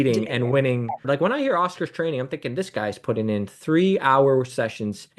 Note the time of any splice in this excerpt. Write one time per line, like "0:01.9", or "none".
0:01.1

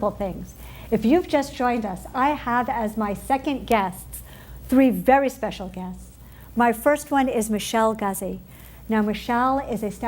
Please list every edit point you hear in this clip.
0:03.4

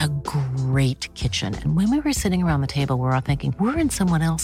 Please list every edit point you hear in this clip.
none

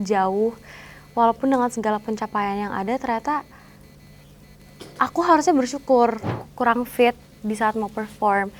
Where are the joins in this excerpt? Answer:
0:06.3

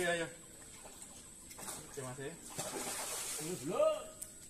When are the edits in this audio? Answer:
none

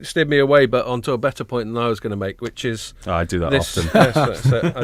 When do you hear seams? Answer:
none

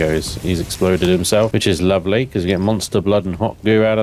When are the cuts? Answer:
0:01.5

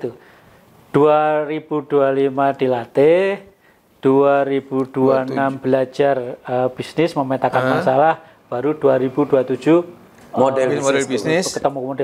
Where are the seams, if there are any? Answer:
none

